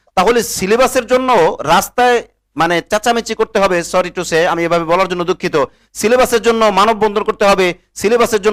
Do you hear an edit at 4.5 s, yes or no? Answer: no